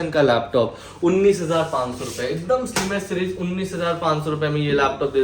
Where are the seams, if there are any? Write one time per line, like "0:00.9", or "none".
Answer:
none